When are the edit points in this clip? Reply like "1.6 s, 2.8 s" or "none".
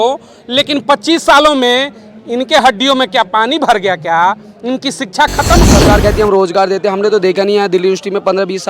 5.6 s